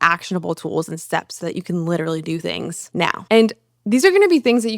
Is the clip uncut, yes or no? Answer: no